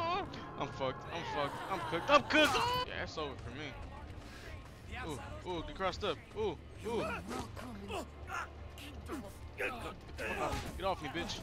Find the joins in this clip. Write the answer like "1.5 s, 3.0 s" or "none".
2.8 s